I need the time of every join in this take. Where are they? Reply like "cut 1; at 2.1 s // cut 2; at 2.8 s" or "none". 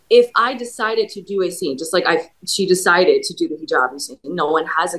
none